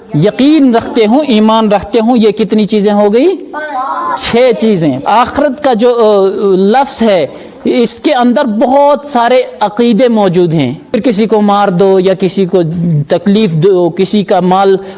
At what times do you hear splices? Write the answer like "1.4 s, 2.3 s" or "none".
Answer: 5.0 s, 10.9 s